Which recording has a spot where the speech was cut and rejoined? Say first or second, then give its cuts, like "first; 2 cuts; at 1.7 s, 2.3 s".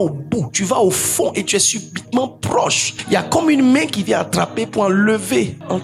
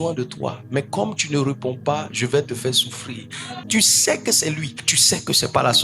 second; 1 cut; at 3.6 s